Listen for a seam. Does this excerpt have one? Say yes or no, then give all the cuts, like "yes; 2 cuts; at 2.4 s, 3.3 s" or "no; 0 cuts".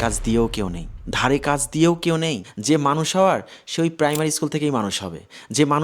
yes; 1 cut; at 2.4 s